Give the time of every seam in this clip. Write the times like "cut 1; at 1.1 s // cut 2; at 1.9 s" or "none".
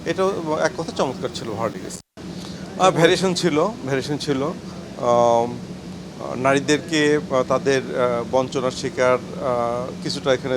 cut 1; at 2.1 s